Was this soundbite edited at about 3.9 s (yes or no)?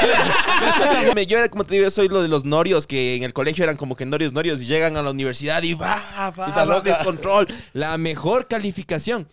no